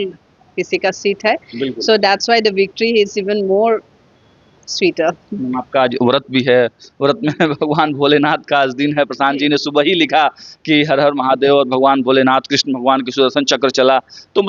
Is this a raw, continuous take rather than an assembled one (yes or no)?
yes